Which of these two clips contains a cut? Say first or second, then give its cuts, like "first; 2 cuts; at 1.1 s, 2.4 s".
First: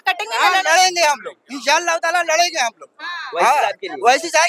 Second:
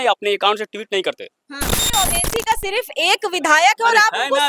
second; 1 cut; at 1.8 s